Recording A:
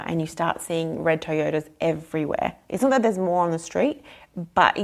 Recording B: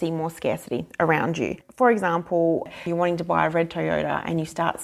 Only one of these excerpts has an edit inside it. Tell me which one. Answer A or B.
B